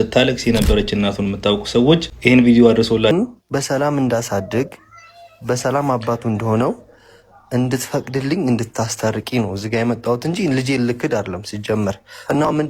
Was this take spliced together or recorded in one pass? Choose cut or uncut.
cut